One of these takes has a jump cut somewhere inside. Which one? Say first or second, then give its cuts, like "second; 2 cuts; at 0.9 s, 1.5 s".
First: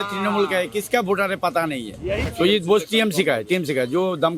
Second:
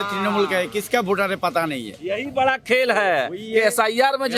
first; 1 cut; at 2.3 s